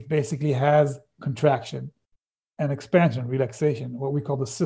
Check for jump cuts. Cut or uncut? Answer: uncut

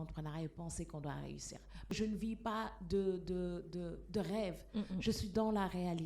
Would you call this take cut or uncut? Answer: cut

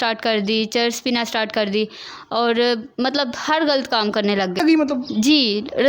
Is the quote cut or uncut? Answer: cut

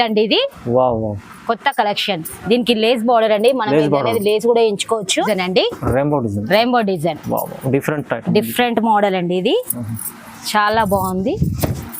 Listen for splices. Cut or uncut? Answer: cut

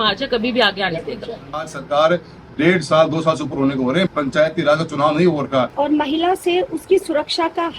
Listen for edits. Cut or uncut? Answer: cut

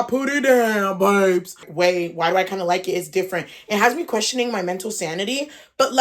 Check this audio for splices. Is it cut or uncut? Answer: cut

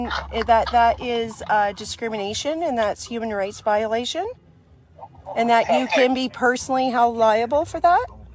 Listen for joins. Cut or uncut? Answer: cut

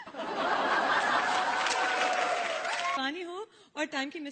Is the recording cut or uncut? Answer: cut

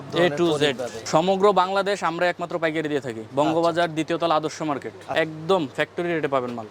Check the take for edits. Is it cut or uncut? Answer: cut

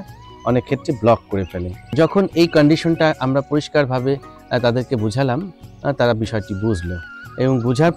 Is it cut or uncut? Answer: cut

